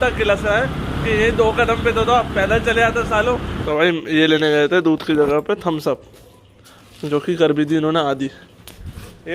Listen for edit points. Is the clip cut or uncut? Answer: cut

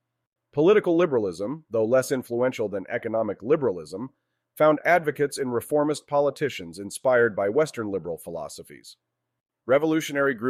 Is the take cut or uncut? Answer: uncut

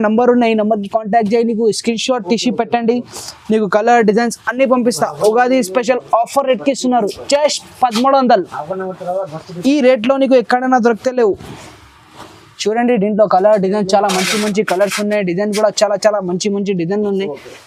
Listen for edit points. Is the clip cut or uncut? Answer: uncut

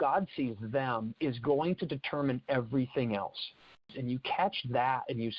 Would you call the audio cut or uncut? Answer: cut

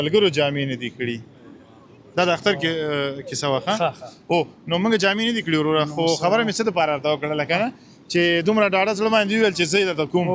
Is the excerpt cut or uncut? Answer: uncut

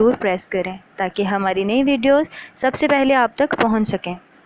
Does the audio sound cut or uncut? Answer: uncut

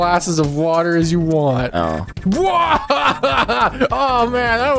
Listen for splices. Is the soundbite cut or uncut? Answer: cut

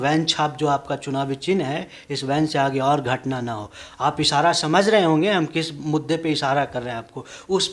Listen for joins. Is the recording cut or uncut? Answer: uncut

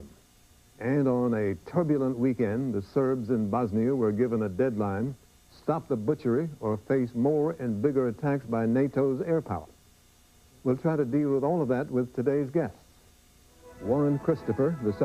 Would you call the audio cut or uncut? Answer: uncut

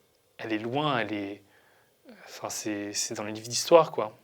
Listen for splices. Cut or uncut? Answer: uncut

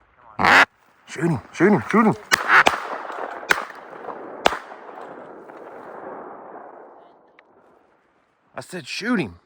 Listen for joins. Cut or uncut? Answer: uncut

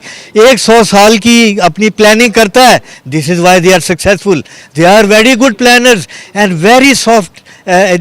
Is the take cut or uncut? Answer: cut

